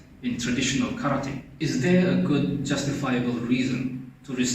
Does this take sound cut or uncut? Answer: cut